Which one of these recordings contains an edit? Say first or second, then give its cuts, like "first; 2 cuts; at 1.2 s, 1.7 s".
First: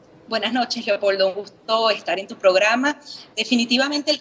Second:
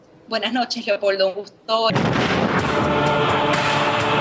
first; 1 cut; at 1.9 s